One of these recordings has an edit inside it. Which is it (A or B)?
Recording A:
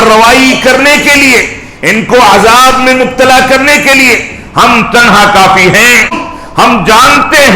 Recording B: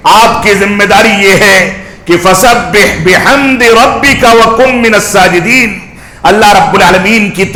A